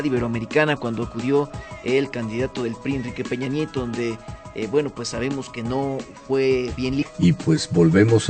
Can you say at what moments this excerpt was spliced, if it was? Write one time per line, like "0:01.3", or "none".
none